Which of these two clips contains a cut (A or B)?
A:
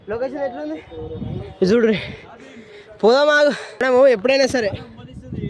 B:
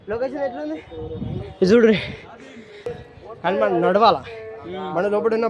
B